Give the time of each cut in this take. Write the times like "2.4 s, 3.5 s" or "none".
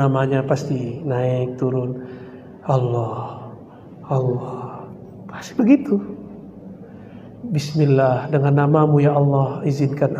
none